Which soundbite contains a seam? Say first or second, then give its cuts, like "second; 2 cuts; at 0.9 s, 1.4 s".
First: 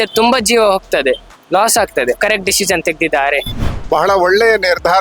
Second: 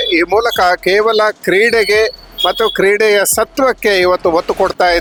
first; 2 cuts; at 2.2 s, 3.7 s